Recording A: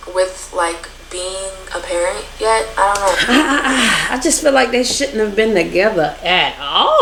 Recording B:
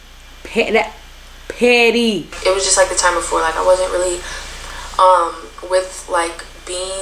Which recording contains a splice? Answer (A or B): B